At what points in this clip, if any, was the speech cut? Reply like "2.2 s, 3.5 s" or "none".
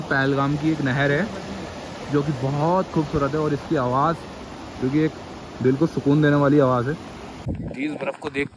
7.3 s